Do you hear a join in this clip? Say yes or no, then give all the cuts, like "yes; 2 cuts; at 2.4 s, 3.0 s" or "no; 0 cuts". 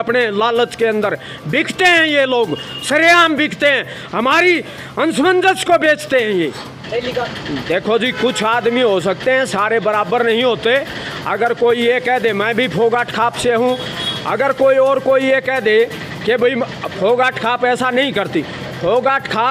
no; 0 cuts